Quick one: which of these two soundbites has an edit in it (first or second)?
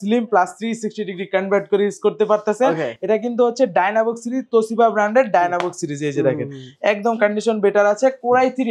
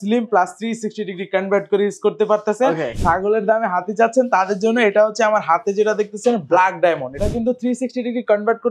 second